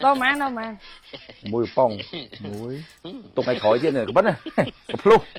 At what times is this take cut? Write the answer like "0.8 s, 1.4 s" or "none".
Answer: none